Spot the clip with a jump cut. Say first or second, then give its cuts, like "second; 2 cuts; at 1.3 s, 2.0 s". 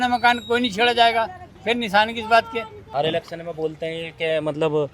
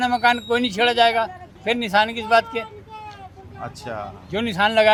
first; 1 cut; at 2.8 s